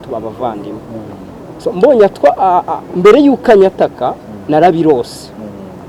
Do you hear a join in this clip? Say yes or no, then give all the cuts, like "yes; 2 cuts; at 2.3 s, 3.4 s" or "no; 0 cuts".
no; 0 cuts